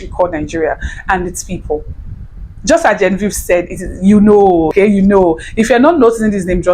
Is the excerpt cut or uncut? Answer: cut